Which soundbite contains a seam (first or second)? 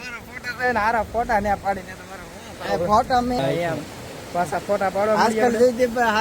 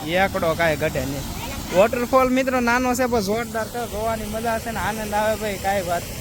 first